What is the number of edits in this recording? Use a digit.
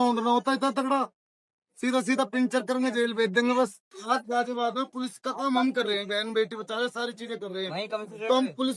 1